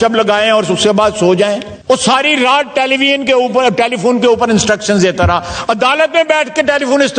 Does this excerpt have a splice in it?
yes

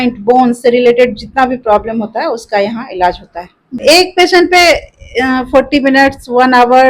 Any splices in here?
yes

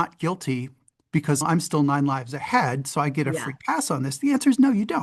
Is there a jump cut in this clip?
yes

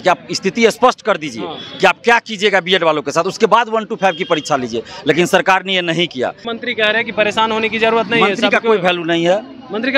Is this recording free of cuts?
no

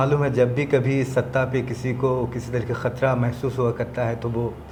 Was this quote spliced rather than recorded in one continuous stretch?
no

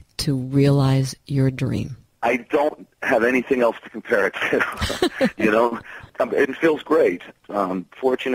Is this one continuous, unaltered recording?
no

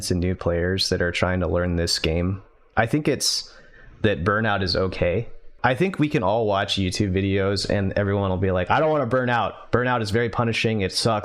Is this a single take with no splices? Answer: no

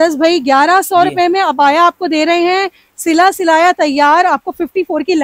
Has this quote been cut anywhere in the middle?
no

